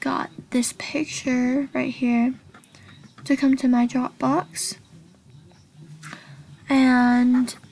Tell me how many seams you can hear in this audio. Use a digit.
0